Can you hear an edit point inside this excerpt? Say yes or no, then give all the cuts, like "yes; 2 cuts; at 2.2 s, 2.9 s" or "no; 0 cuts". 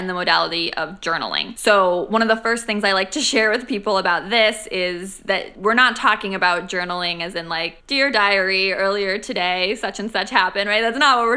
no; 0 cuts